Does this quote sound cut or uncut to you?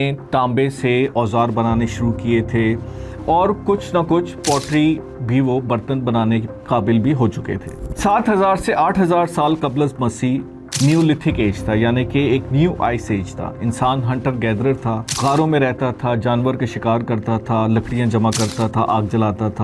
uncut